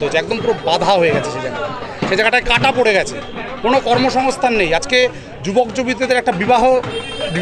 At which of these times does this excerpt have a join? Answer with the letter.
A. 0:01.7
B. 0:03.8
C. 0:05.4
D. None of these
D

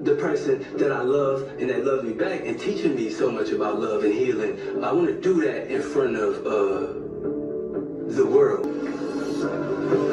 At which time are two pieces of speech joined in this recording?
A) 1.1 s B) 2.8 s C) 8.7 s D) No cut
C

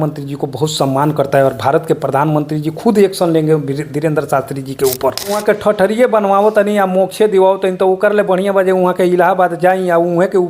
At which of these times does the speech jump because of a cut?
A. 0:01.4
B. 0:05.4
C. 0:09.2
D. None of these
B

